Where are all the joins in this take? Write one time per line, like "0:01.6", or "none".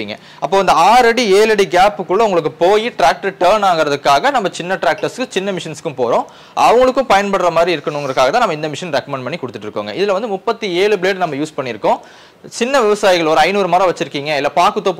none

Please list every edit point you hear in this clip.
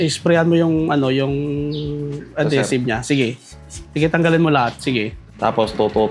0:05.2

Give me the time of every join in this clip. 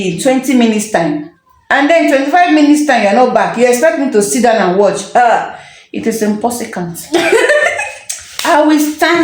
none

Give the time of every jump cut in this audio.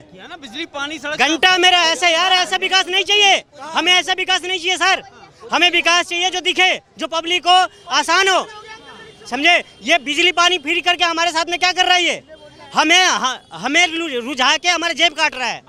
none

